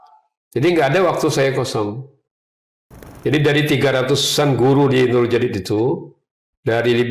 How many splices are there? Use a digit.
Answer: 1